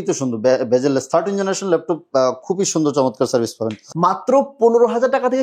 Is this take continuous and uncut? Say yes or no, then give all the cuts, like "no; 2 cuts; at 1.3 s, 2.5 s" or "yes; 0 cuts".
no; 1 cut; at 3.8 s